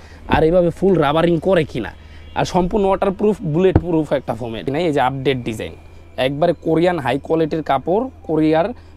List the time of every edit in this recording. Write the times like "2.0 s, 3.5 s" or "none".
4.6 s